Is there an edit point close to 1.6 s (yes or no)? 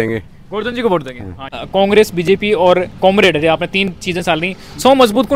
yes